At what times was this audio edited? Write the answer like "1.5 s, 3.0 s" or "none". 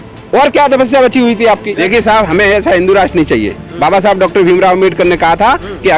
1.7 s